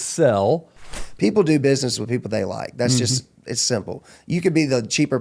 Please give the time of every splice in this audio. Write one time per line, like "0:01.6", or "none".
0:00.9